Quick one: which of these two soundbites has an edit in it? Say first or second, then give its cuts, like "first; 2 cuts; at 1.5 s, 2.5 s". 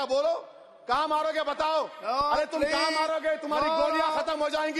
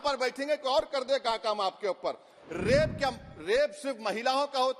second; 1 cut; at 2.4 s